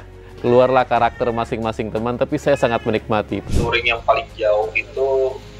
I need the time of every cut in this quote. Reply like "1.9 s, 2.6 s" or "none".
3.4 s